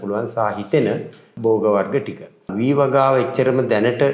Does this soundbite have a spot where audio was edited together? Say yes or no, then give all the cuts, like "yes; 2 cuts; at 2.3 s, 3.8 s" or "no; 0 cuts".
yes; 2 cuts; at 1.3 s, 2.5 s